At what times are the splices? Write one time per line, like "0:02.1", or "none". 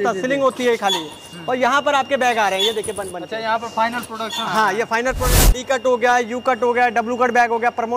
0:05.4